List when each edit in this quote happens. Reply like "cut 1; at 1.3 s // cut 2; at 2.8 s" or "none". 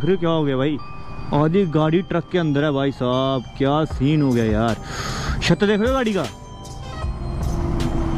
none